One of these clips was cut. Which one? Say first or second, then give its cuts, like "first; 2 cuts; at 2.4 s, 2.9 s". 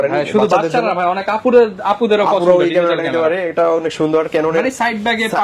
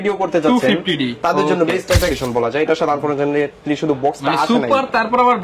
second; 1 cut; at 2.1 s